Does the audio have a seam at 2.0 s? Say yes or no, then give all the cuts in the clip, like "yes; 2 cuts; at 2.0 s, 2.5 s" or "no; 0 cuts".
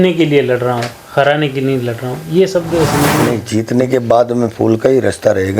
no; 1 cut; at 3.2 s